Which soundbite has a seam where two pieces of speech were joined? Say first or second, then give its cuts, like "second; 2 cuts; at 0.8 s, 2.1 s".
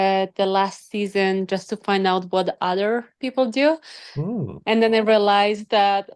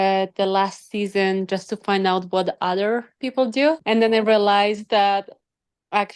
second; 1 cut; at 3.8 s